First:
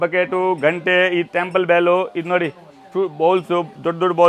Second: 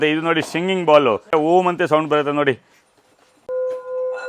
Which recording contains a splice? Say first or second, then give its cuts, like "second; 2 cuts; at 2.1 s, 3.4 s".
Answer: second; 2 cuts; at 1.3 s, 3.4 s